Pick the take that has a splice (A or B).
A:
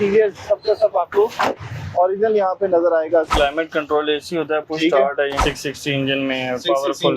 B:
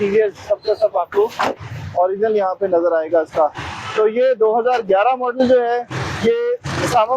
A